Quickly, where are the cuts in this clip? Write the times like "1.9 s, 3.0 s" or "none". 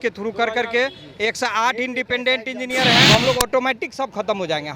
3.1 s